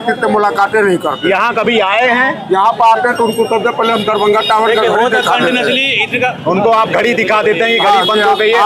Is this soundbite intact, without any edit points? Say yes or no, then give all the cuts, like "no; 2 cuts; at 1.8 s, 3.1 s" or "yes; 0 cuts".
yes; 0 cuts